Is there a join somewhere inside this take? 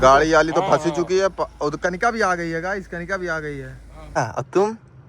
yes; 1 cut; at 4.2 s

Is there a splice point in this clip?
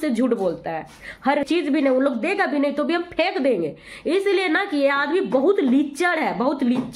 yes; 1 cut; at 1.5 s

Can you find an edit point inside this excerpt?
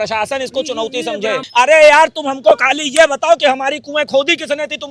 yes; 1 cut; at 1.4 s

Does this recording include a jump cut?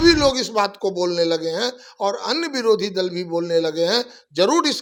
no; 0 cuts

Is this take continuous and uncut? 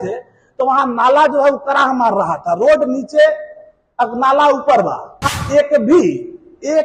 no; 1 cut; at 5.4 s

